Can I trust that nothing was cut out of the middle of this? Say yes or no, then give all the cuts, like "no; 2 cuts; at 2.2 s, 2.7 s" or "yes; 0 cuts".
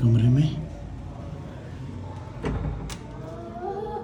yes; 0 cuts